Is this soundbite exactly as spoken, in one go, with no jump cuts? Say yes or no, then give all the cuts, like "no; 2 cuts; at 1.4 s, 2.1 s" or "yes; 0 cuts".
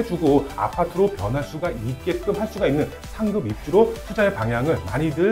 yes; 0 cuts